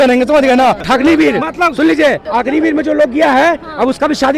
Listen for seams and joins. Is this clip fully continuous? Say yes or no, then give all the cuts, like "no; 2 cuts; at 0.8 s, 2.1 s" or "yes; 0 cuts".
no; 2 cuts; at 0.8 s, 2.2 s